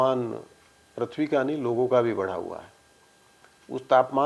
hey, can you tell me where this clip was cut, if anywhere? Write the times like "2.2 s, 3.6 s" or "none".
none